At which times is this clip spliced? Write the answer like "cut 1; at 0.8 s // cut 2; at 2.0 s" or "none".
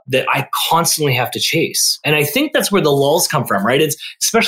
cut 1; at 2.0 s